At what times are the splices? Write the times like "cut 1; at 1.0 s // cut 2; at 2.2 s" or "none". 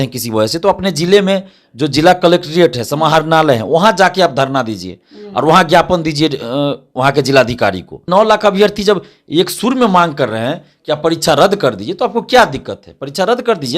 cut 1; at 8.0 s